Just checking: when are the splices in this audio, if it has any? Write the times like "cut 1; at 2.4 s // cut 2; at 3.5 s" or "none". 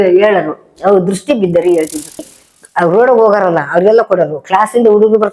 cut 1; at 2.3 s